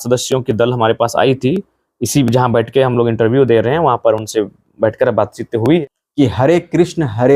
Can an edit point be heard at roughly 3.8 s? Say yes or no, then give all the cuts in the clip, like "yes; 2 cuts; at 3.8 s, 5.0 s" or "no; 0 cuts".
no; 1 cut; at 5.8 s